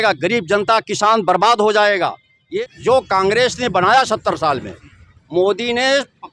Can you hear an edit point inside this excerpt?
yes; 1 cut; at 2.5 s

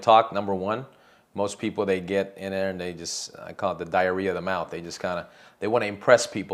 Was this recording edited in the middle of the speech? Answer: no; 0 cuts

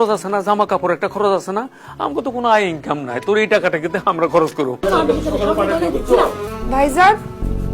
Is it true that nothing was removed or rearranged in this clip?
no; 2 cuts; at 4.8 s, 6.4 s

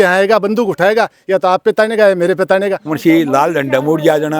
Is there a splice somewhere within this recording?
yes; 1 cut; at 2.9 s

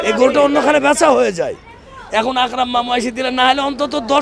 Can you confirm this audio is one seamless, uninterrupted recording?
yes; 0 cuts

